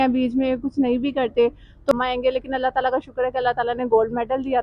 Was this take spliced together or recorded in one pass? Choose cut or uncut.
cut